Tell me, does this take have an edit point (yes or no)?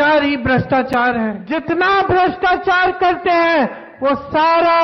yes